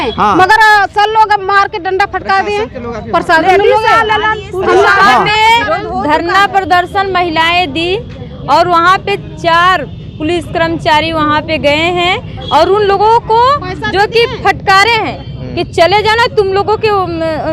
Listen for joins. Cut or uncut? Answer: uncut